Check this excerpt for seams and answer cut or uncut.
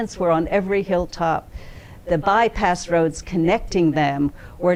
uncut